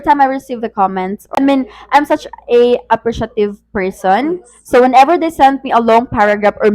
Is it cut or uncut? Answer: cut